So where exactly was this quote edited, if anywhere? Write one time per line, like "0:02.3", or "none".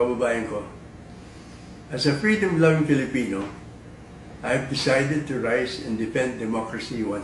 0:01.3